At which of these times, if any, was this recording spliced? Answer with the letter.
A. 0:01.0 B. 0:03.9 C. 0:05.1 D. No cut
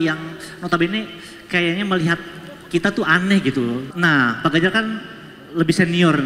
B